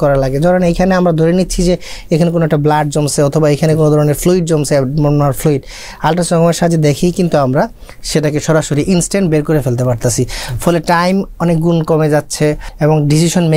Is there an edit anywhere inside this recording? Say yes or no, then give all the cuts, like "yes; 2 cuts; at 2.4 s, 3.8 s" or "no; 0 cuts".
yes; 1 cut; at 12.7 s